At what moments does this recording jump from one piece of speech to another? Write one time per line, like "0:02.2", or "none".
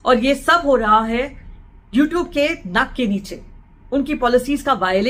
none